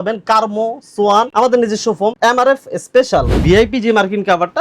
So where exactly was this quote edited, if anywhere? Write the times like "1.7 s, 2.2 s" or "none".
1.3 s, 2.2 s, 3.3 s